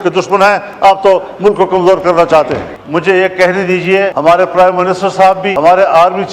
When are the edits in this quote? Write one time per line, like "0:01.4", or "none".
0:02.7
0:04.1
0:05.5